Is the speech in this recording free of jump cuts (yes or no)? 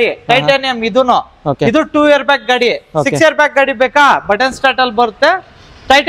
yes